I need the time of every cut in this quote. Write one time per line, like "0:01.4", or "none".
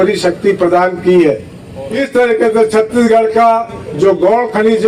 0:01.8